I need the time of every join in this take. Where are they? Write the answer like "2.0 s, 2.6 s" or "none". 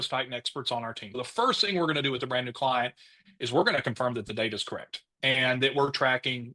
1.1 s

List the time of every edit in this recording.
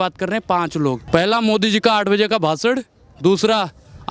1.0 s

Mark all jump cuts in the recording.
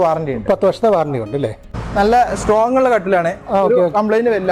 1.6 s

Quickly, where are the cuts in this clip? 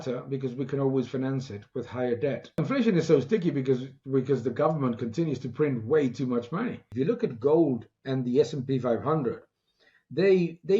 2.6 s, 6.9 s

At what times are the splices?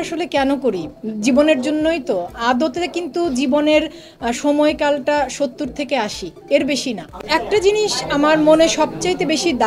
7.2 s

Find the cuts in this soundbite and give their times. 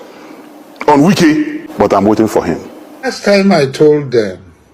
1.6 s, 3.1 s

